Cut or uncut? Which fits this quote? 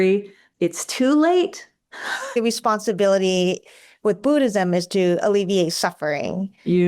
cut